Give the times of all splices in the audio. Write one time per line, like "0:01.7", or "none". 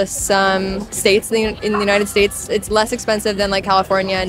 none